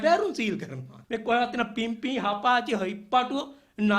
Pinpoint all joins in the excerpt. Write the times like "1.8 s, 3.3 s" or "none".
0.9 s